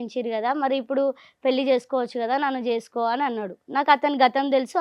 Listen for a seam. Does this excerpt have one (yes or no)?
no